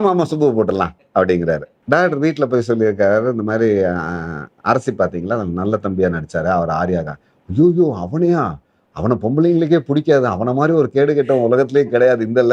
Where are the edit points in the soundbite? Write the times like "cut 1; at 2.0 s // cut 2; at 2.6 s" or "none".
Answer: cut 1; at 1.7 s